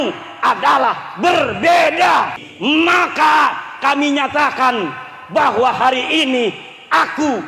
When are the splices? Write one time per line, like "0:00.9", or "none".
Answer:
0:02.5